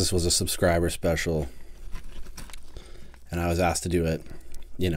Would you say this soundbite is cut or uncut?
uncut